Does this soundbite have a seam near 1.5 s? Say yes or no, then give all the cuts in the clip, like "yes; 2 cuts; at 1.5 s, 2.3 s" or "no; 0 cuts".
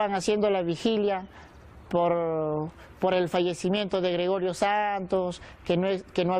no; 1 cut; at 2.8 s